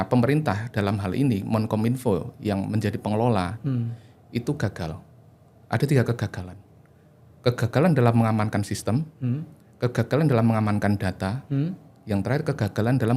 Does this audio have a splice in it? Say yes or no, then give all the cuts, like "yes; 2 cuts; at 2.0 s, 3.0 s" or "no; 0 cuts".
no; 0 cuts